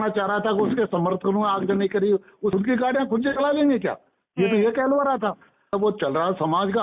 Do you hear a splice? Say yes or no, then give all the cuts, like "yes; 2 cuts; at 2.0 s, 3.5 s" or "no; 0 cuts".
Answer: yes; 2 cuts; at 2.5 s, 5.7 s